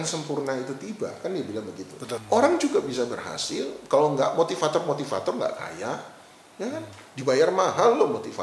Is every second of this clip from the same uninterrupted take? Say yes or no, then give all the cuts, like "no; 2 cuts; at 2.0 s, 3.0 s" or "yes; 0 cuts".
no; 1 cut; at 2.2 s